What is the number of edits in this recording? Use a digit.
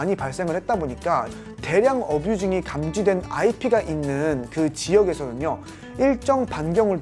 1